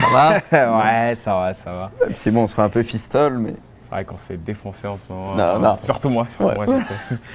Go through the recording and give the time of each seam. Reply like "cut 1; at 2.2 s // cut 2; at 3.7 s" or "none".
none